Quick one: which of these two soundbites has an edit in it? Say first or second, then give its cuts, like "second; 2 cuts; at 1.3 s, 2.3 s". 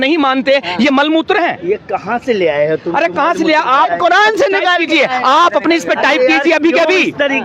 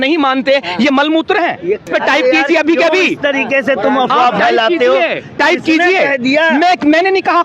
second; 1 cut; at 1.9 s